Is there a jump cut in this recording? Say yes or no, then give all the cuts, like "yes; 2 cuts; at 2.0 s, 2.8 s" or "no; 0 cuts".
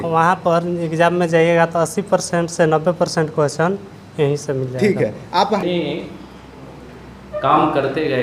yes; 1 cut; at 5.6 s